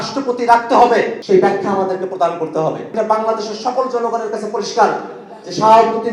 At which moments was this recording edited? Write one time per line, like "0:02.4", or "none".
0:01.2
0:02.9